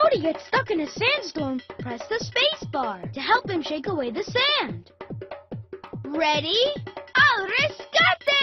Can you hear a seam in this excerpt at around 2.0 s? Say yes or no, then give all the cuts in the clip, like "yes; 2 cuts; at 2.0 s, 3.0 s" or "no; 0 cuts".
no; 0 cuts